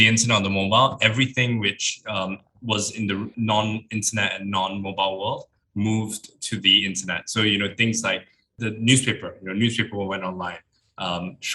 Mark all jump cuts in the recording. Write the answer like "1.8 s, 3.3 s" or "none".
3.3 s, 8.5 s

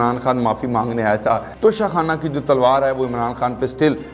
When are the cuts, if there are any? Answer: 1.5 s

